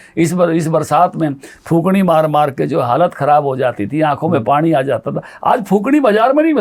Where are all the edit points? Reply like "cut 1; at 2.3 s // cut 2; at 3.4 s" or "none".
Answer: none